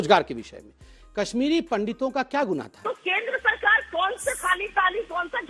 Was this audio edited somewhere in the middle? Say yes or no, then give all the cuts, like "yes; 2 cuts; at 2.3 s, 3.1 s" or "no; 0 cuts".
yes; 1 cut; at 2.8 s